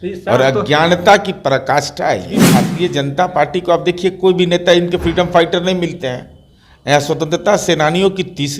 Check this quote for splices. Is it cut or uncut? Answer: cut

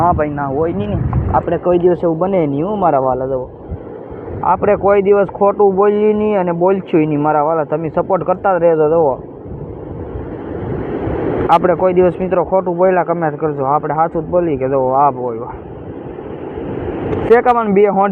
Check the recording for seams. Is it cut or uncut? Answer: uncut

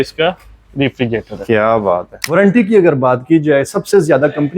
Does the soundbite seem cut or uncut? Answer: cut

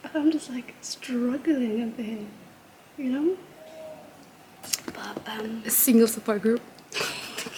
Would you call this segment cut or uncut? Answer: uncut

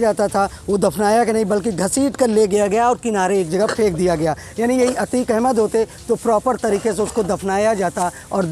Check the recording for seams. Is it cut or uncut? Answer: uncut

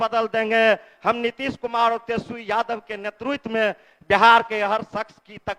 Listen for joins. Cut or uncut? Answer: uncut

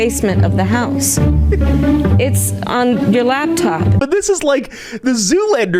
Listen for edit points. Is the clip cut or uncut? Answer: cut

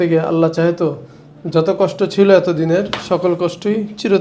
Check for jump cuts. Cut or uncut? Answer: uncut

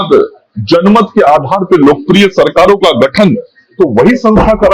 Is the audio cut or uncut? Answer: uncut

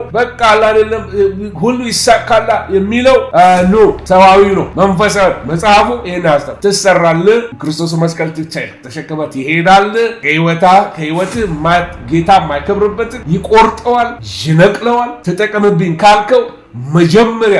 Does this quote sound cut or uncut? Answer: cut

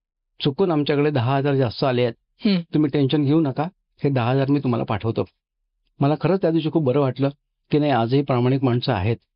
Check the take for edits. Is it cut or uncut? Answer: uncut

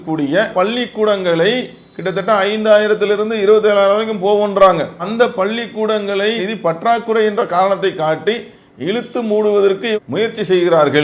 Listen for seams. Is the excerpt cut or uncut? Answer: uncut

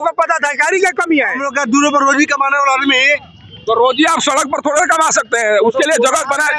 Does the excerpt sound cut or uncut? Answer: cut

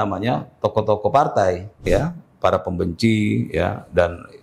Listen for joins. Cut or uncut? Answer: cut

